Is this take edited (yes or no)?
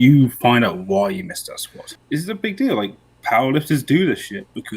yes